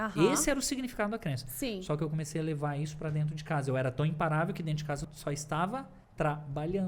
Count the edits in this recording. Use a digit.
2